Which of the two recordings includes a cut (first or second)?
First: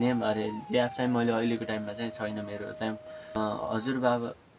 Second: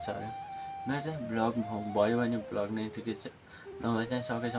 first